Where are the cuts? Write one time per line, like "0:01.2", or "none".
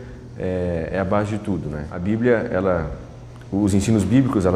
0:01.9